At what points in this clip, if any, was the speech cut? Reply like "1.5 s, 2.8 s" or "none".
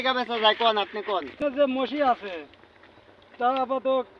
1.4 s

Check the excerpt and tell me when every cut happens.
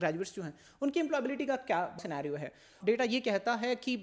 2.0 s

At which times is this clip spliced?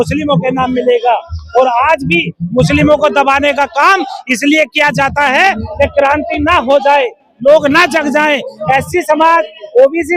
none

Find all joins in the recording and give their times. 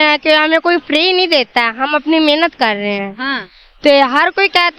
none

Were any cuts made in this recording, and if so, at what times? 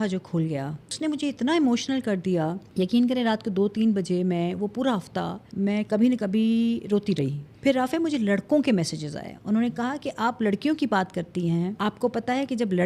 0.9 s, 2.6 s, 5.4 s, 7.4 s, 11.7 s

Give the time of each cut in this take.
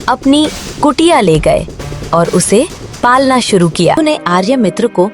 4.0 s

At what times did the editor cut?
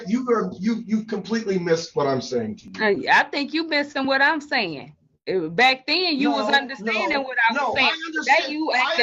none

